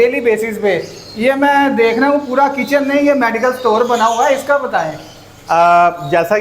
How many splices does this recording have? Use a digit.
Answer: 0